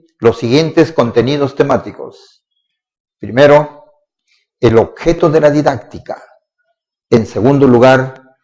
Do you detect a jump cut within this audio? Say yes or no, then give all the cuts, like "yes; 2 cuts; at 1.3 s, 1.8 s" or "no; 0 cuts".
no; 0 cuts